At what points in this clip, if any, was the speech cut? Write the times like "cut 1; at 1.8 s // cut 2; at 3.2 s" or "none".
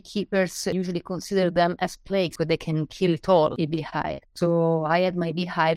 cut 1; at 0.7 s // cut 2; at 2.3 s // cut 3; at 3.5 s